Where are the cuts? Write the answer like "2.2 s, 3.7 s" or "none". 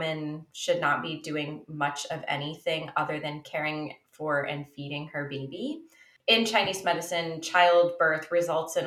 6.0 s